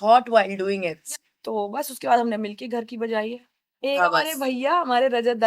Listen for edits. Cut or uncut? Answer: cut